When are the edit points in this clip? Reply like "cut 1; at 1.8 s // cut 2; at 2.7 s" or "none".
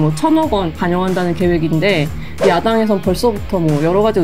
none